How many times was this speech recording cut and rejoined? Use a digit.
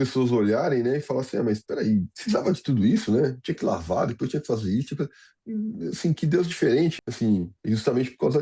3